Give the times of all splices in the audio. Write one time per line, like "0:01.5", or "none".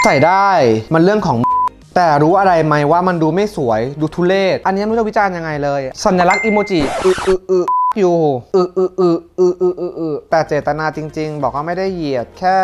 0:04.6
0:10.2